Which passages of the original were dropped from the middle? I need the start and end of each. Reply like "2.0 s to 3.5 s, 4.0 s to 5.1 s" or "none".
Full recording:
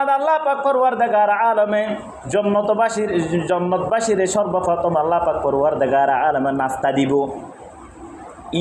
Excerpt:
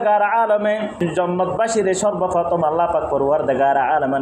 2.0 s to 3.3 s